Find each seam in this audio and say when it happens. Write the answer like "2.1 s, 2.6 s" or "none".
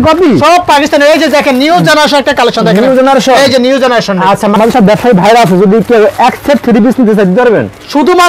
4.5 s